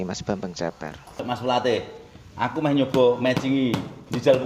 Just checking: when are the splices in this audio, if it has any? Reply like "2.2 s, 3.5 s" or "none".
1.2 s